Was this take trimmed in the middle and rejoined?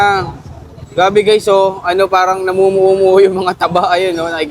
no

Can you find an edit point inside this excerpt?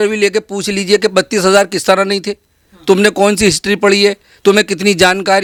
no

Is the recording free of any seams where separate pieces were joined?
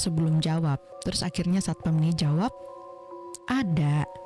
no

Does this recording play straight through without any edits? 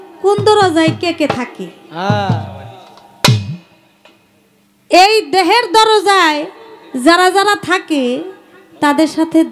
yes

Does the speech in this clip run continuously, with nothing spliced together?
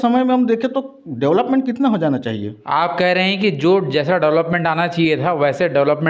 yes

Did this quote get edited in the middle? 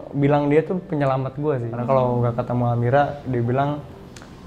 yes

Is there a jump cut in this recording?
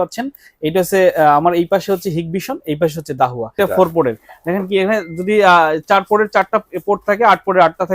yes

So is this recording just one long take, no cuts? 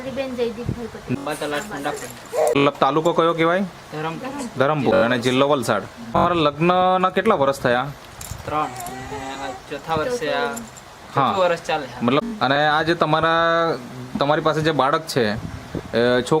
no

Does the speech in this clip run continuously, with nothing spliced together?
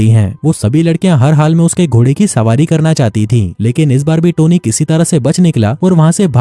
yes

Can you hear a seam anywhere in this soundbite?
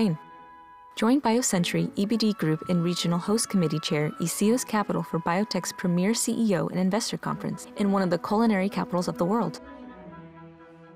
yes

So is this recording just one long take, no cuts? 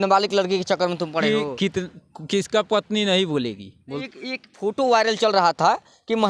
no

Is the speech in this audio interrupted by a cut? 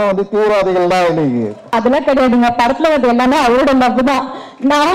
yes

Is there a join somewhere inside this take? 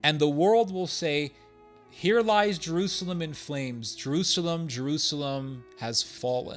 no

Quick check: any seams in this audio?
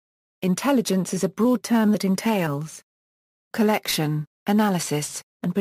no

